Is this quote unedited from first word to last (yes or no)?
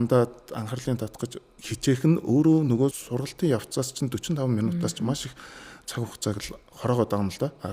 no